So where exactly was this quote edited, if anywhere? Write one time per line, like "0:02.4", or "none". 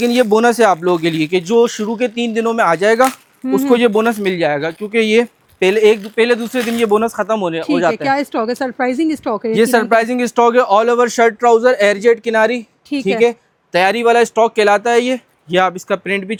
none